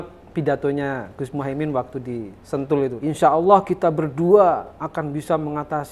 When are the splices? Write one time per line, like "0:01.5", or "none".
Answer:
0:03.0